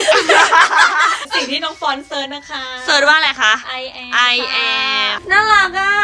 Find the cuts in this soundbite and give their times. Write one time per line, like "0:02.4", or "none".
0:01.2
0:05.2